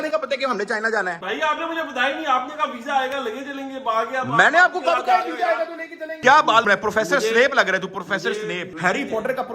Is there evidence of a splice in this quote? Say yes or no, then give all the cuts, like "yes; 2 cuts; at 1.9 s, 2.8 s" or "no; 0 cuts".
yes; 1 cut; at 6.2 s